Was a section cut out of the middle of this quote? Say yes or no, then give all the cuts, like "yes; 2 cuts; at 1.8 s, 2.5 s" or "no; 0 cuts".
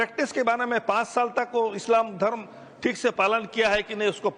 no; 0 cuts